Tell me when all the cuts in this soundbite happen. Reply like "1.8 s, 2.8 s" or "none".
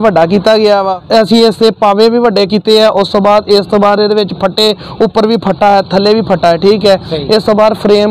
0.9 s